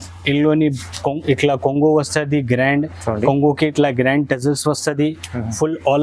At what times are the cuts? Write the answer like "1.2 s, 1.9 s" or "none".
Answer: none